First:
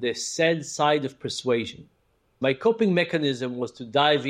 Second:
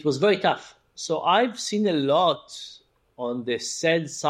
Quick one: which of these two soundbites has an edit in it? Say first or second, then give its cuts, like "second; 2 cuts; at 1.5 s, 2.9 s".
first; 1 cut; at 2.3 s